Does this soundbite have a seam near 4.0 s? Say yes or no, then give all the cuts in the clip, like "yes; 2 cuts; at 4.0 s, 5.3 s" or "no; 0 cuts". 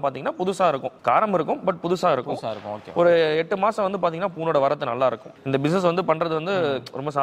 no; 2 cuts; at 0.9 s, 5.3 s